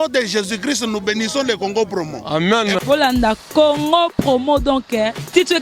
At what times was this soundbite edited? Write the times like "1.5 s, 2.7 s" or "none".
none